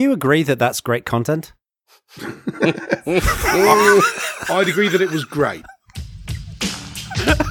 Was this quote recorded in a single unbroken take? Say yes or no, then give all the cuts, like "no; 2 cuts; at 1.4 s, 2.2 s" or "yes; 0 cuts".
yes; 0 cuts